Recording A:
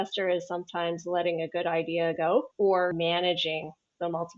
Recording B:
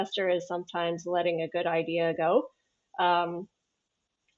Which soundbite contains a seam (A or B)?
A